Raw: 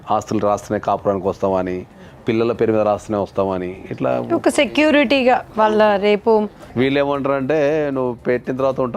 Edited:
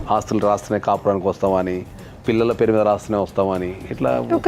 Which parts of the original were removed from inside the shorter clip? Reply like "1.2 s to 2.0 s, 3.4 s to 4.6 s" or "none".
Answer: none